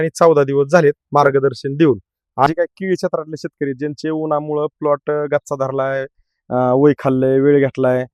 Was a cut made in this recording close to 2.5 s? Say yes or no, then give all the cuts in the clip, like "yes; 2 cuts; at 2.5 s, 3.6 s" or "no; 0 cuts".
yes; 1 cut; at 2.5 s